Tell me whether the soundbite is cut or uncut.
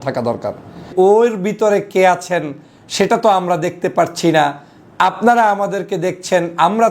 cut